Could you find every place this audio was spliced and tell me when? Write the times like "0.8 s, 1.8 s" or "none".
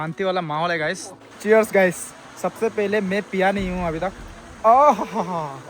1.1 s